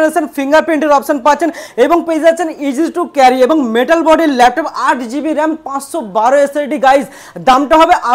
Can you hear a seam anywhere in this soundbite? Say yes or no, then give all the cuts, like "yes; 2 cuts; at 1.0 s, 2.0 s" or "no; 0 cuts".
no; 0 cuts